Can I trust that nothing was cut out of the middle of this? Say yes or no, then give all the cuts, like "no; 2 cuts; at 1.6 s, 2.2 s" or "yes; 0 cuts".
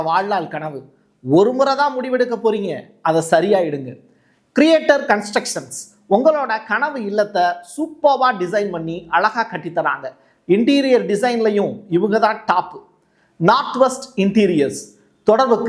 yes; 0 cuts